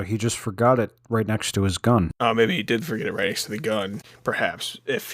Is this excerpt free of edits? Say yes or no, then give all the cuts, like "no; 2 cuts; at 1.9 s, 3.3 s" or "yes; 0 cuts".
no; 2 cuts; at 2.1 s, 4.1 s